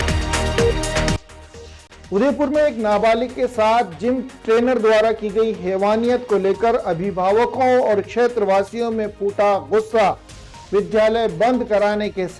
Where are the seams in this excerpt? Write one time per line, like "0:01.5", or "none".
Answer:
0:01.1